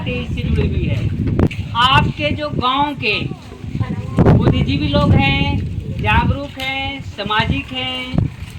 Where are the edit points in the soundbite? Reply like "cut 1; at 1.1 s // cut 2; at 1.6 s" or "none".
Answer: cut 1; at 1.6 s